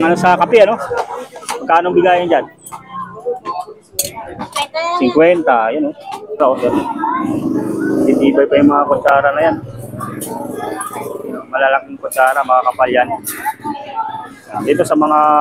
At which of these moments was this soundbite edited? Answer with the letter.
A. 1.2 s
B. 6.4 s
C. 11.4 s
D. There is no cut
B